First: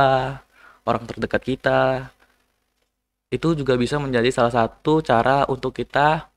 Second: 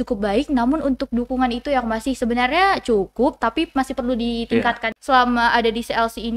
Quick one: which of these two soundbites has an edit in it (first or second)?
second